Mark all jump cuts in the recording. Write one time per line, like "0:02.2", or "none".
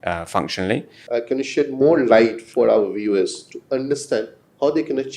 0:00.9